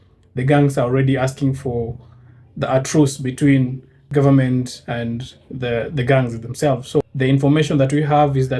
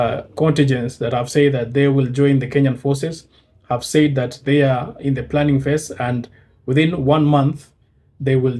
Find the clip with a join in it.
first; 2 cuts; at 3.9 s, 7.1 s

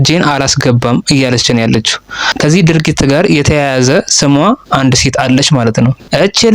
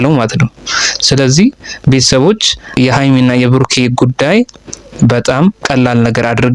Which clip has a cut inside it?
second; 1 cut; at 5.6 s

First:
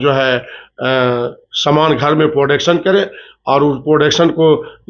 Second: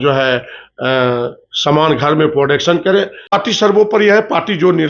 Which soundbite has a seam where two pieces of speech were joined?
second; 1 cut; at 3.2 s

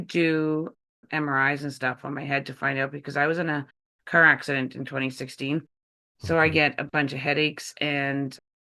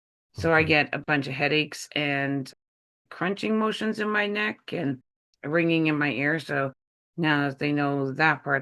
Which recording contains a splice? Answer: first; 1 cut; at 0.9 s

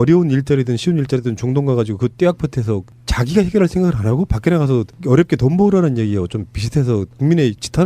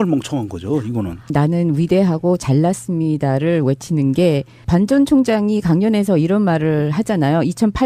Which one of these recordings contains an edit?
first; 1 cut; at 3.8 s

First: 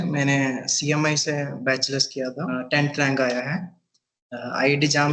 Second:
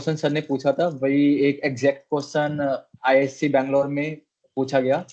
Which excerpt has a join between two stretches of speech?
first; 1 cut; at 2.5 s

